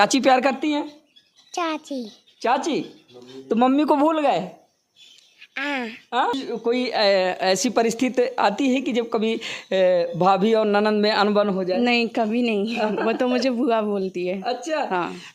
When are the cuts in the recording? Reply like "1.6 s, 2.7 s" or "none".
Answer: 6.4 s